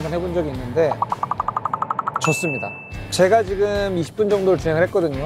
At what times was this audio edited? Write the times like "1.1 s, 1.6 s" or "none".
2.8 s